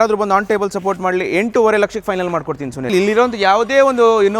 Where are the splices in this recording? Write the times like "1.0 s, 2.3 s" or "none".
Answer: 2.9 s